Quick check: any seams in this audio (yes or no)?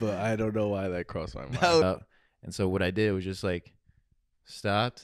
yes